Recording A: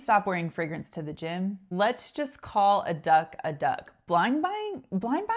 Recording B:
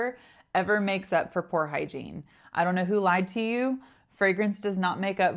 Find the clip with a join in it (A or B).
A